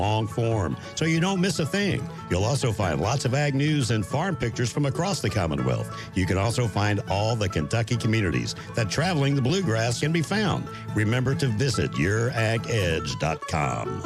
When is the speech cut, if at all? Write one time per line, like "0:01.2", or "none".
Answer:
none

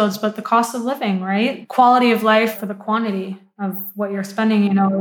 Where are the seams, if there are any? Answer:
0:01.6
0:02.5

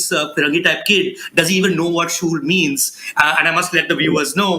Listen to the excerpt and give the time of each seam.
none

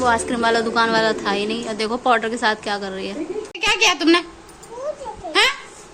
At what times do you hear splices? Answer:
0:03.5

